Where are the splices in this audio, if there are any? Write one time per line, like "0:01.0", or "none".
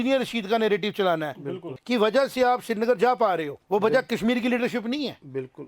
0:01.7
0:03.5

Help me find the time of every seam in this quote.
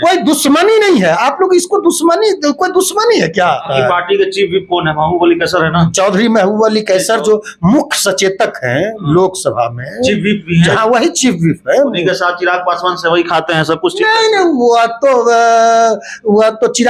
0:03.7

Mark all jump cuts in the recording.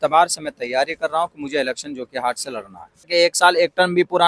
0:03.1

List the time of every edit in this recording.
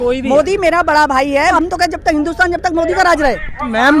0:01.5

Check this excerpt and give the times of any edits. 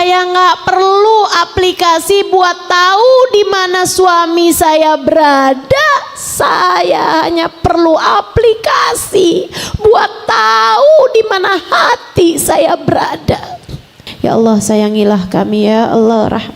0:14.0

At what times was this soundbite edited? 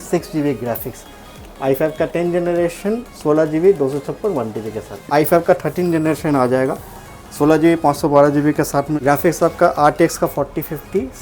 0:05.0
0:08.9

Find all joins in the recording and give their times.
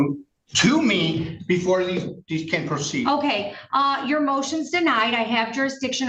none

